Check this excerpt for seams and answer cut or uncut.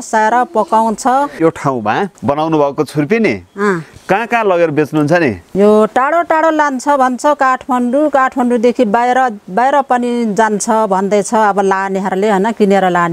cut